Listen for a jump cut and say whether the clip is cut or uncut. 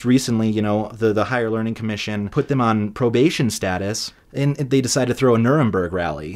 cut